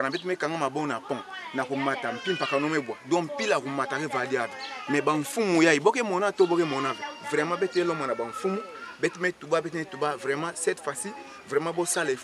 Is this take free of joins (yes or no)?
yes